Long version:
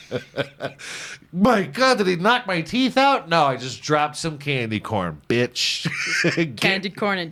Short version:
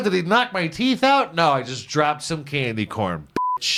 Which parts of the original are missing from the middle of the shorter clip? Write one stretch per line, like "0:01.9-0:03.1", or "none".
none